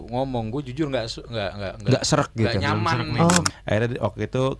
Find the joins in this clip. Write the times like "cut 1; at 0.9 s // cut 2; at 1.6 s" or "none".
cut 1; at 3.5 s